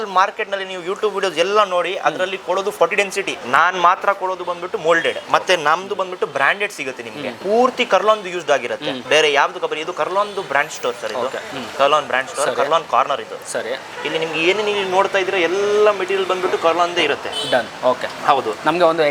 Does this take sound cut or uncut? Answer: uncut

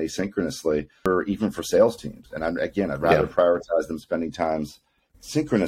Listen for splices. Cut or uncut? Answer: cut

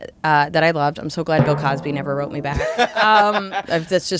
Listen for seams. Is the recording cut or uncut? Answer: uncut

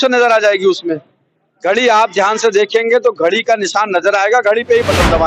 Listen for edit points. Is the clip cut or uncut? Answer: uncut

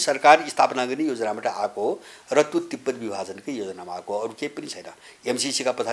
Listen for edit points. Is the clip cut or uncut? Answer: uncut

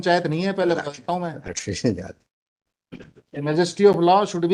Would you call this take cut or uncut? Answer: uncut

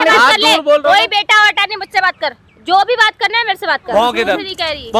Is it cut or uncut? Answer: cut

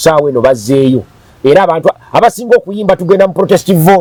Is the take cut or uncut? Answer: uncut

